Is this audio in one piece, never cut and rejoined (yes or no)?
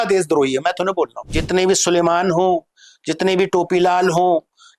no